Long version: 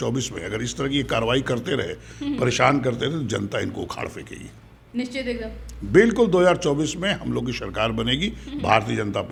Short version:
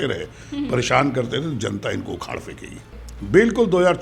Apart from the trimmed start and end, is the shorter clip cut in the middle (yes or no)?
yes